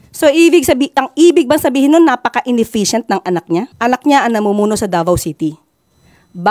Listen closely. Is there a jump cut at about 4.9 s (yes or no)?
no